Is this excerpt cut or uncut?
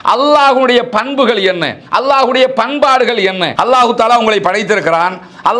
cut